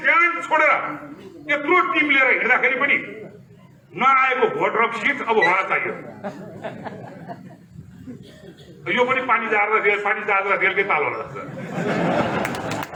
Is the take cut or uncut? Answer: uncut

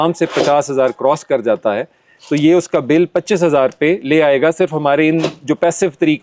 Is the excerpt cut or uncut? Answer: uncut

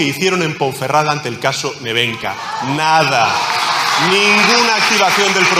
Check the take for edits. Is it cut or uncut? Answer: uncut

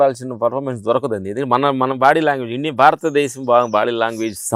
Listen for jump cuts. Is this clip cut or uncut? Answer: uncut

